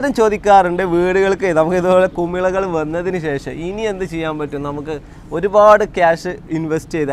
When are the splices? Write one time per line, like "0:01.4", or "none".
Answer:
none

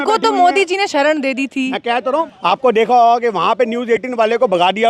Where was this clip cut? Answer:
0:02.2

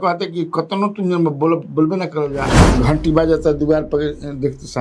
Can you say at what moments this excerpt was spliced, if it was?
0:02.6

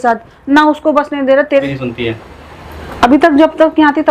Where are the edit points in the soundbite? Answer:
0:01.5

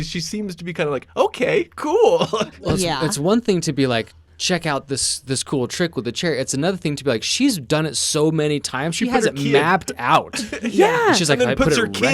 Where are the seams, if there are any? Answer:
0:02.6

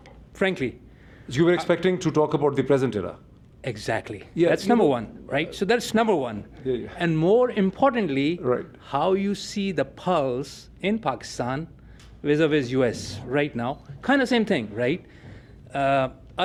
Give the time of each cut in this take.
none

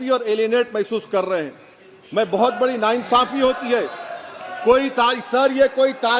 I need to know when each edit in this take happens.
none

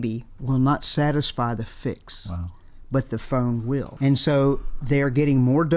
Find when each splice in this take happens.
0:03.9

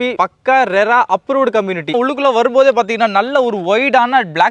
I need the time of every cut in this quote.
0:01.9

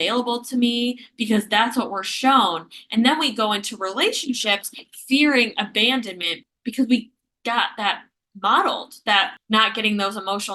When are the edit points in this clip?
0:06.4
0:09.4

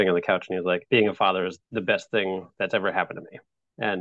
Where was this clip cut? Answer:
0:00.8
0:01.6

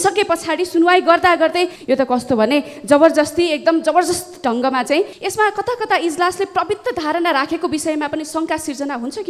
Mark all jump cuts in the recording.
0:01.8
0:05.2

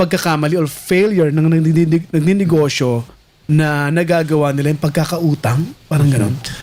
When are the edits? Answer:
none

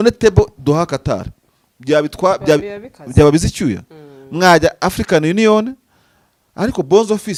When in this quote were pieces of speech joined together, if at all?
none

